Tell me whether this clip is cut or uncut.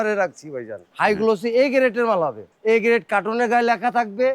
cut